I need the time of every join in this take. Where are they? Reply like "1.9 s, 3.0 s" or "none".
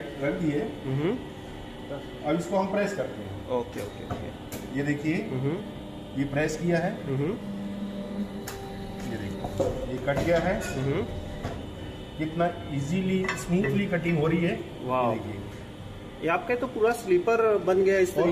none